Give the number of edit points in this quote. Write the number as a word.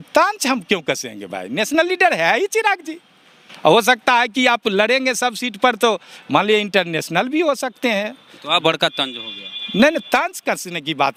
zero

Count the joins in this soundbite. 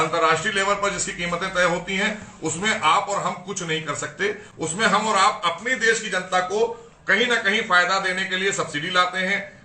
zero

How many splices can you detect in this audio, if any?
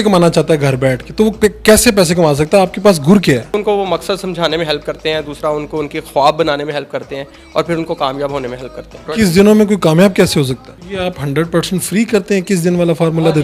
three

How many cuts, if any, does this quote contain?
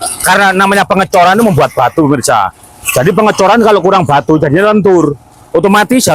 zero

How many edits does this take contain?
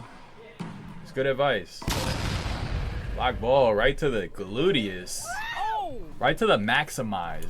one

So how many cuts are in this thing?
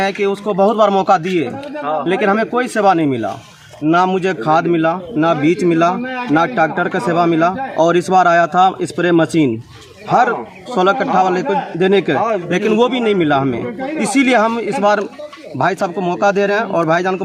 zero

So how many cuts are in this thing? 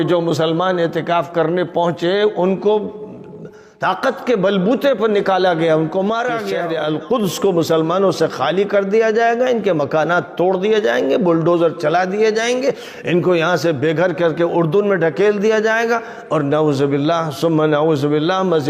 one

